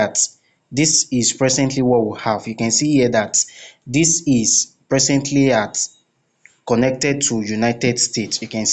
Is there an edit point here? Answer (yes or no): no